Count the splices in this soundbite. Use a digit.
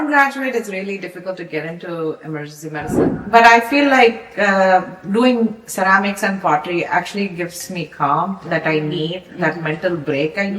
1